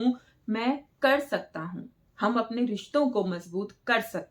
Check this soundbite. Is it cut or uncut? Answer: uncut